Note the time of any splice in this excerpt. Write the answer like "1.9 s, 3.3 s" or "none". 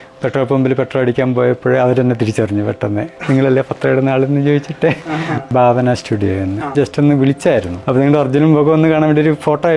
5.5 s, 6.7 s, 7.8 s